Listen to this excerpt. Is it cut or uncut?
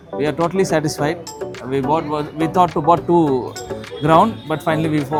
uncut